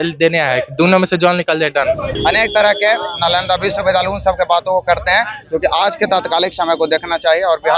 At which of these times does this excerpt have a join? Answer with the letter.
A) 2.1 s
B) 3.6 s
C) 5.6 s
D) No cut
A